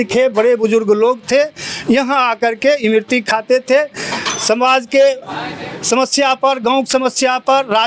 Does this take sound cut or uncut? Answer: uncut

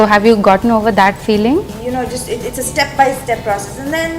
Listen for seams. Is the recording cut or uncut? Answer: cut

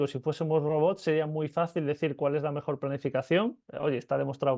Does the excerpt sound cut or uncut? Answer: uncut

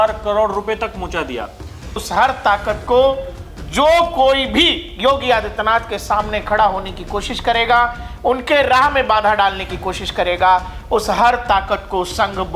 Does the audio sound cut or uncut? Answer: cut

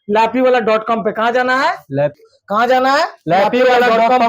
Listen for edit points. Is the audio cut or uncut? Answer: cut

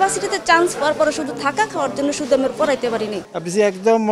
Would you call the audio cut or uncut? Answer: cut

